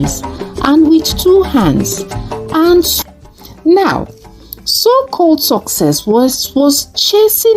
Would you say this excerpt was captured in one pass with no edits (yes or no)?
no